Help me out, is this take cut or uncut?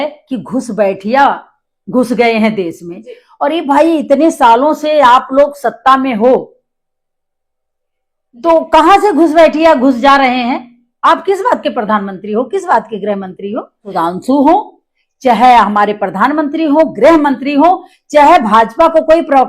cut